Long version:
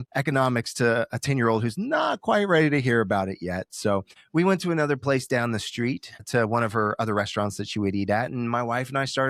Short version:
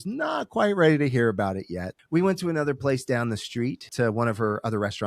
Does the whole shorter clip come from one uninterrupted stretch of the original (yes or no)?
no